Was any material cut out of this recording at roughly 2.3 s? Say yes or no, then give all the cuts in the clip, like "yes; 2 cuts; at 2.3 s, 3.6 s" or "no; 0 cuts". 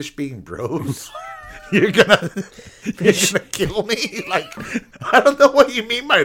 no; 1 cut; at 5.0 s